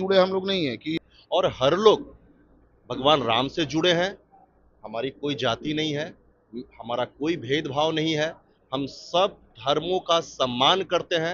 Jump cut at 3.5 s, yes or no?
no